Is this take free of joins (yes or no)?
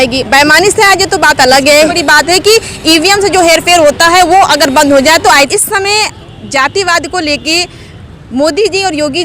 no